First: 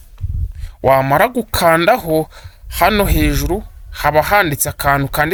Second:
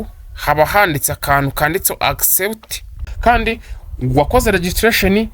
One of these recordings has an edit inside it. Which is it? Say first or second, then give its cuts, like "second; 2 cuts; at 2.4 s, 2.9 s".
second; 1 cut; at 3.0 s